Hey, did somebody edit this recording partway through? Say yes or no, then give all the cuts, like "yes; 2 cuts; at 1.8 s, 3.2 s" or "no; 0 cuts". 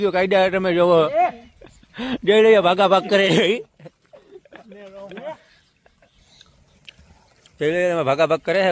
no; 0 cuts